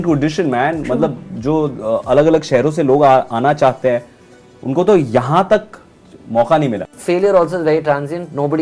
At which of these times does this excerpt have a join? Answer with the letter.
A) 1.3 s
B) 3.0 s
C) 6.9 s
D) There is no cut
C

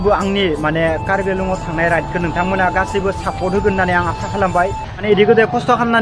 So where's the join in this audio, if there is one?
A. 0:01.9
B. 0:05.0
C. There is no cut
B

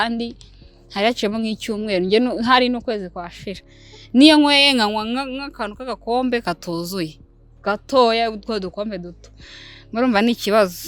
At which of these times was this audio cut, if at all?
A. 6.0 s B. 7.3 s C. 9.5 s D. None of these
D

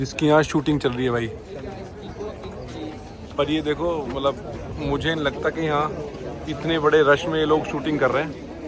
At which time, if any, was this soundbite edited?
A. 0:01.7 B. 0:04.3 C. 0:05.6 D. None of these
D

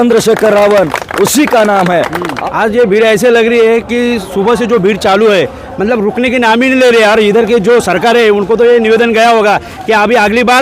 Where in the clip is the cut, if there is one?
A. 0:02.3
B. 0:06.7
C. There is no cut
A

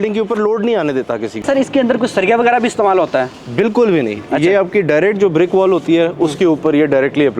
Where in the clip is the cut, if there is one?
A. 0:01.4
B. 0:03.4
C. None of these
A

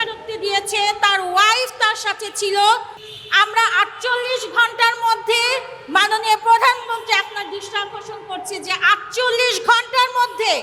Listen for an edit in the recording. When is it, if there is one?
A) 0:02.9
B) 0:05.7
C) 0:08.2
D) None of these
A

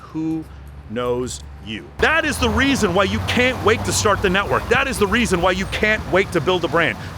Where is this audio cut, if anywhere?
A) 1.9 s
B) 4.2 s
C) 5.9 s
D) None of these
A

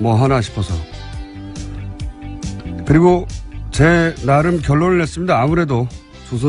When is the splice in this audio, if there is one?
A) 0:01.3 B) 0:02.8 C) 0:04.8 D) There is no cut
C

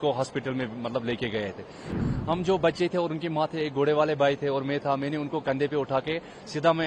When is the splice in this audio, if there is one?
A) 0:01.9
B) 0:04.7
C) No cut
A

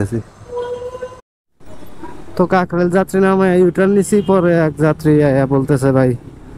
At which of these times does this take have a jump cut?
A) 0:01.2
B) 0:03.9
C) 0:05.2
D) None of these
A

